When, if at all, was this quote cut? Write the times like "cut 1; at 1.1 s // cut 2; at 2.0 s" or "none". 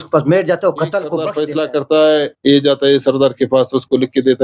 cut 1; at 1.3 s